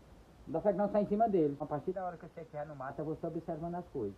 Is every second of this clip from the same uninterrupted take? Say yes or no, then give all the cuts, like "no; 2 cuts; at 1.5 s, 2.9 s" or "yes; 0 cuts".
no; 1 cut; at 1.6 s